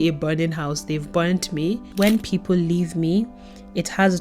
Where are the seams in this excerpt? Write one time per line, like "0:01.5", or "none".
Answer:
0:01.9